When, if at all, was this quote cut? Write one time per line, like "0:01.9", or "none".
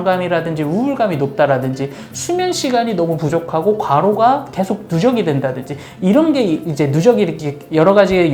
none

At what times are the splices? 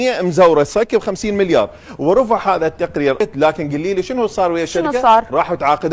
0:03.2

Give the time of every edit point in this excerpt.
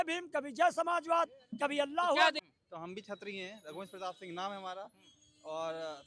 0:02.4

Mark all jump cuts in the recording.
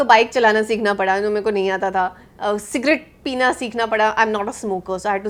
none

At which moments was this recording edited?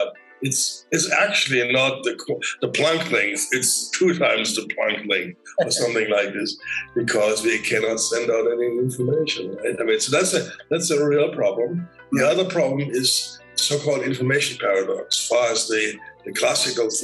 0:13.4
0:15.1

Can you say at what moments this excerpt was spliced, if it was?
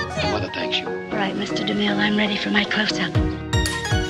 none

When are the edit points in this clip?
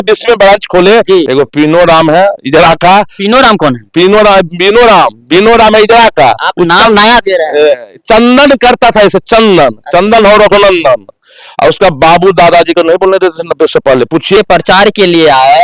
0:01.3
0:14.4

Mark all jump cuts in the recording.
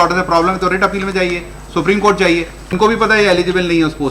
0:02.8

